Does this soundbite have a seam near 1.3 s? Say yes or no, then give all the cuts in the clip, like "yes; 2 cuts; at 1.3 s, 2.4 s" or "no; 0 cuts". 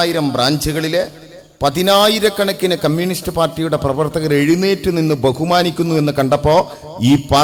no; 0 cuts